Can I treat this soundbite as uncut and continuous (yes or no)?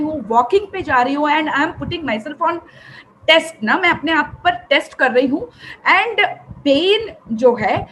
yes